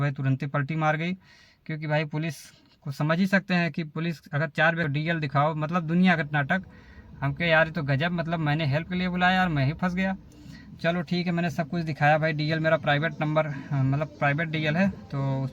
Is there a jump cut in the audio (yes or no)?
yes